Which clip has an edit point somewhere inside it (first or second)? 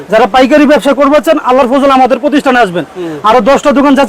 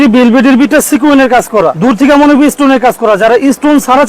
second